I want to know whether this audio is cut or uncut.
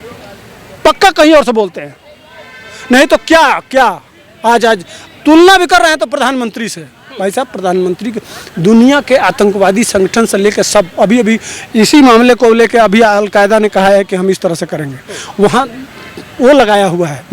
uncut